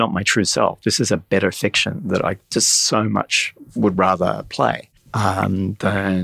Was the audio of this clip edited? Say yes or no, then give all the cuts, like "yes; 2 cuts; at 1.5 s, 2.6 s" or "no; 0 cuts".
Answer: yes; 1 cut; at 4.9 s